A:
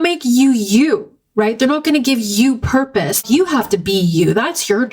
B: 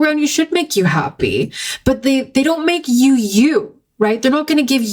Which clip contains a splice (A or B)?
A